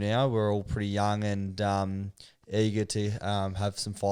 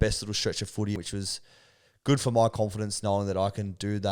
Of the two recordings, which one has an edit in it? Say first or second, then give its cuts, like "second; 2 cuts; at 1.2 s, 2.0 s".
second; 1 cut; at 0.9 s